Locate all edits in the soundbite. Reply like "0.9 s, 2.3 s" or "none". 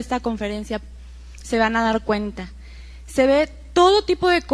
none